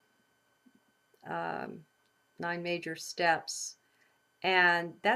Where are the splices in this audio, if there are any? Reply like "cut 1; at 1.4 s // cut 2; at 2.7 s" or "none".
cut 1; at 3.1 s